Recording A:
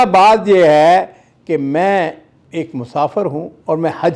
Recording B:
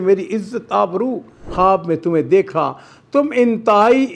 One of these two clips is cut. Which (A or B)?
B